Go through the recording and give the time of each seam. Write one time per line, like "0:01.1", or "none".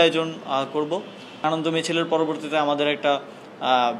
0:01.4